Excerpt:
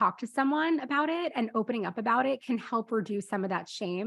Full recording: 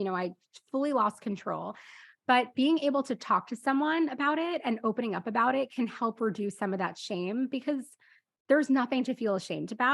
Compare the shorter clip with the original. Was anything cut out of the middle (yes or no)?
no